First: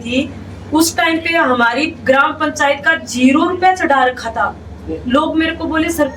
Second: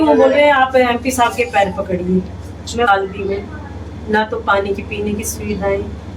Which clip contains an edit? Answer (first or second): second